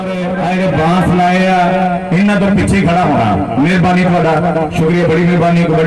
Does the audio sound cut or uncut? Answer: uncut